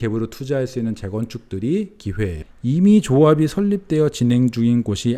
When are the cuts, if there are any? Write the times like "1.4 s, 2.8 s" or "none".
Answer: 2.5 s